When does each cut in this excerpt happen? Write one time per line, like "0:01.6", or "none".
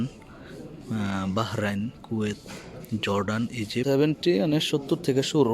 0:03.8